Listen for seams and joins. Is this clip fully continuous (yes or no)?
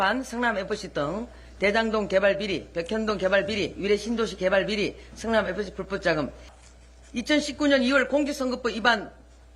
no